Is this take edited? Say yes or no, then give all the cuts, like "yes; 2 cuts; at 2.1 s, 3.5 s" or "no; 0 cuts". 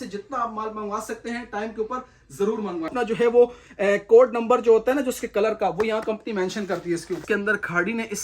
yes; 2 cuts; at 2.9 s, 7.2 s